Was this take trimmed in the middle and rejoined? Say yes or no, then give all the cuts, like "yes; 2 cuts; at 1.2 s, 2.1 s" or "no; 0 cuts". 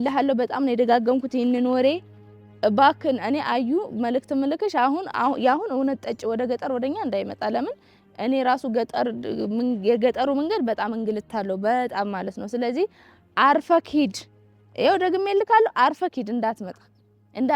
no; 0 cuts